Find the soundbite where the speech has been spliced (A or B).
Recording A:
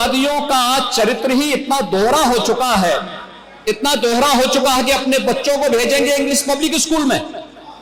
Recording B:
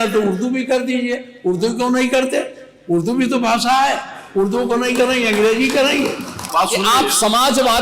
B